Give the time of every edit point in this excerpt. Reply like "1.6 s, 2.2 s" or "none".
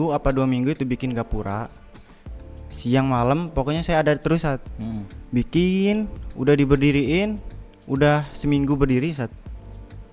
none